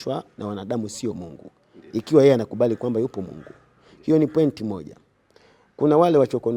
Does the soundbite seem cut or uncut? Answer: uncut